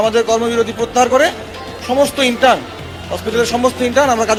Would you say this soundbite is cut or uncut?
uncut